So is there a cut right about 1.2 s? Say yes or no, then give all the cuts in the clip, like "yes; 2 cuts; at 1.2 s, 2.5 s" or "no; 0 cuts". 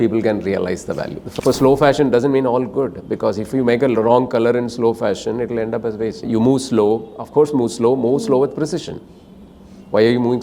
yes; 2 cuts; at 1.2 s, 6.2 s